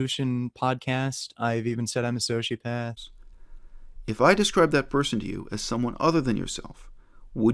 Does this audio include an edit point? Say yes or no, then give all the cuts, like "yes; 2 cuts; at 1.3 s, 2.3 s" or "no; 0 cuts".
yes; 1 cut; at 3.0 s